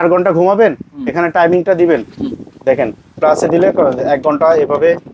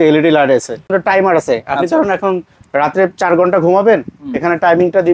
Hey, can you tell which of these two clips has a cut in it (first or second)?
second